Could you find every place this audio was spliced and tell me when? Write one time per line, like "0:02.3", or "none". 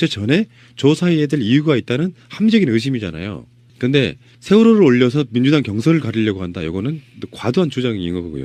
none